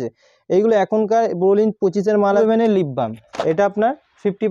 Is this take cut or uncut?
cut